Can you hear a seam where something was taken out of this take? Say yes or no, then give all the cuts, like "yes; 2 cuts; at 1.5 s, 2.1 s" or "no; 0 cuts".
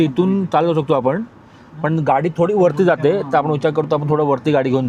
no; 0 cuts